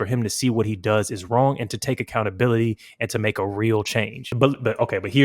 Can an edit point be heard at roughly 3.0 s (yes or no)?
no